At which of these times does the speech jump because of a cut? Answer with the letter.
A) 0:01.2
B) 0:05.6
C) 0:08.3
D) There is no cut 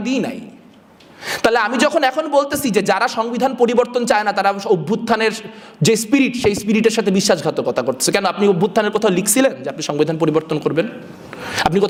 D